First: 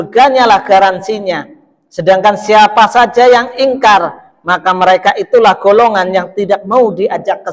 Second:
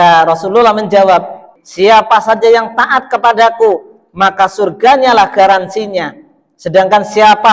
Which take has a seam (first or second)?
second